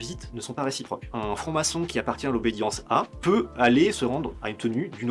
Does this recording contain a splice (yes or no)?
no